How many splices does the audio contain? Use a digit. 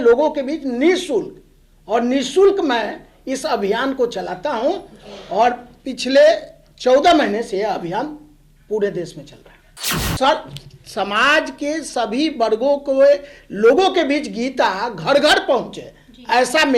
1